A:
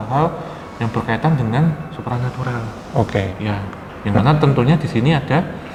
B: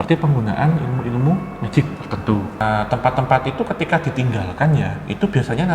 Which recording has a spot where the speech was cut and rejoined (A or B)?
B